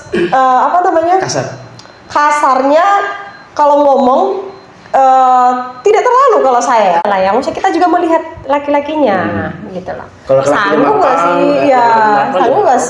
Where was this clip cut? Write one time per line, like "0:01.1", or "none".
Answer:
0:07.0